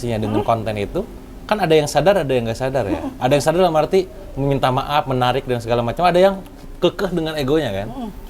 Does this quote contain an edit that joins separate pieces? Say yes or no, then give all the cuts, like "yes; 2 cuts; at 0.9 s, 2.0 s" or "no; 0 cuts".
no; 0 cuts